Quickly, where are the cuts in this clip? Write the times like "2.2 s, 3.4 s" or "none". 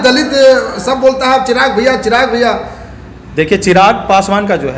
none